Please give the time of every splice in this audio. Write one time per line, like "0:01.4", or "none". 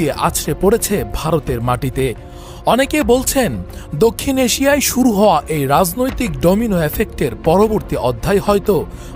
none